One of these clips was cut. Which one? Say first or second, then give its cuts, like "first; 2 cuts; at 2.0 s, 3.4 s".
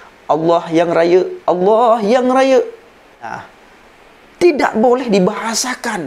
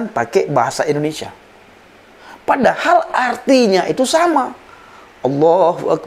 first; 1 cut; at 3.2 s